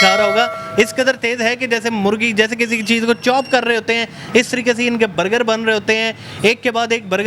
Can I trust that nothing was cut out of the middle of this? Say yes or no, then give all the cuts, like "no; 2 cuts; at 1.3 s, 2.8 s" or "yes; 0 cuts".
yes; 0 cuts